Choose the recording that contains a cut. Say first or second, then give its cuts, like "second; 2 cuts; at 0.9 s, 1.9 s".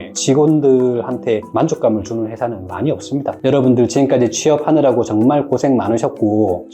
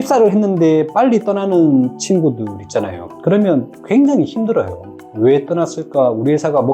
first; 1 cut; at 3.3 s